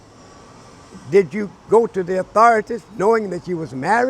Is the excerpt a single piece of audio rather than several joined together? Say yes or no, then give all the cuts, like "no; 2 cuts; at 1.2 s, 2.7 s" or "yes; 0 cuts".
yes; 0 cuts